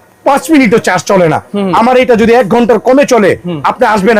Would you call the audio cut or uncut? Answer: uncut